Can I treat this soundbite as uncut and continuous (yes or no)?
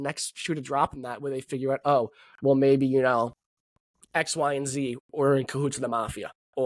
yes